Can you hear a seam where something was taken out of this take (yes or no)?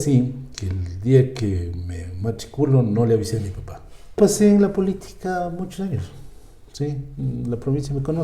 yes